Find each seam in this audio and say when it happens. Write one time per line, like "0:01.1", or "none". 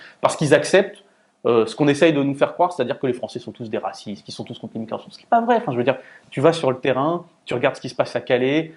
none